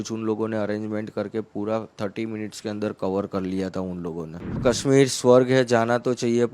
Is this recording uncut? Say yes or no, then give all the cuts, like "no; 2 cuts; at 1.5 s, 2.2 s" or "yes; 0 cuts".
no; 1 cut; at 4.6 s